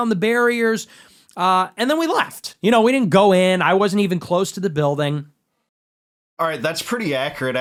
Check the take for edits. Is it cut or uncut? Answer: uncut